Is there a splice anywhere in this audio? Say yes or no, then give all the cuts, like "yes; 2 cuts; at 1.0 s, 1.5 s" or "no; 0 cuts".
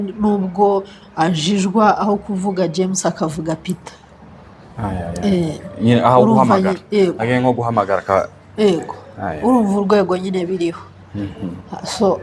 no; 0 cuts